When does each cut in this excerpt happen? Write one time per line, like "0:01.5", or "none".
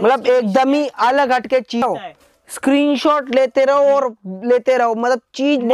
0:01.8